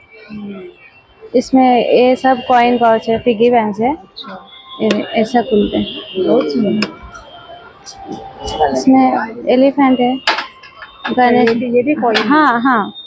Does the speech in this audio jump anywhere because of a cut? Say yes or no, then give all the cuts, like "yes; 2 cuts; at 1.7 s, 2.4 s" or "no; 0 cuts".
no; 0 cuts